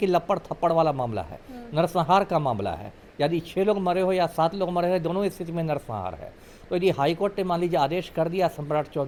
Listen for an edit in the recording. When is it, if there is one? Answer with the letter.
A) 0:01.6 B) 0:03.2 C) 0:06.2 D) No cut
D